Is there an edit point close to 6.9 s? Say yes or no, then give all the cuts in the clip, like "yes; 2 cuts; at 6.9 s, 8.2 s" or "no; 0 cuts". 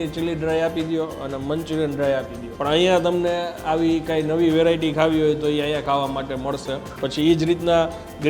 yes; 2 cuts; at 2.4 s, 6.9 s